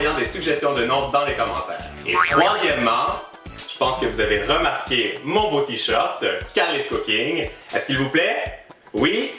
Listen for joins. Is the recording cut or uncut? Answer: cut